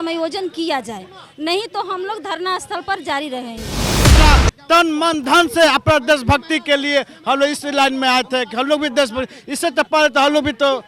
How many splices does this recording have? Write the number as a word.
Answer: one